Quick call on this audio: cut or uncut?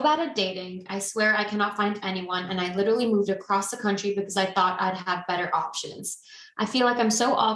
uncut